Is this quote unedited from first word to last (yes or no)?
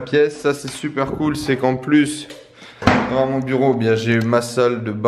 yes